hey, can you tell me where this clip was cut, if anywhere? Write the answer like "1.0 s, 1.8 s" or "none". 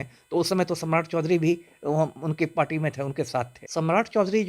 3.6 s